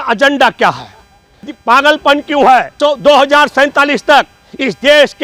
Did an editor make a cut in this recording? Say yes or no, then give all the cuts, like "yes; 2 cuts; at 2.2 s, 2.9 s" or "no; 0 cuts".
no; 0 cuts